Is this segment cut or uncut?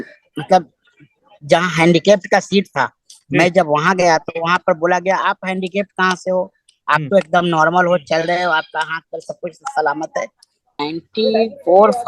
cut